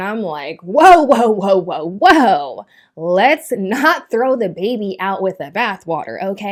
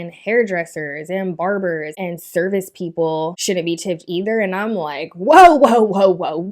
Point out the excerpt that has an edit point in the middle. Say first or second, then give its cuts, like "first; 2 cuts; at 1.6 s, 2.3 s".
second; 2 cuts; at 1.9 s, 3.4 s